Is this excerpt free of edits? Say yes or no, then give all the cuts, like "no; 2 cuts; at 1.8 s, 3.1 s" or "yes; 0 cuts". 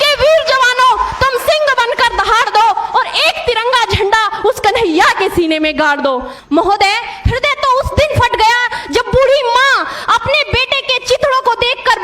no; 1 cut; at 6.3 s